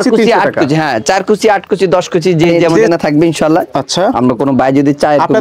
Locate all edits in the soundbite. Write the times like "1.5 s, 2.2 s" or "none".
2.9 s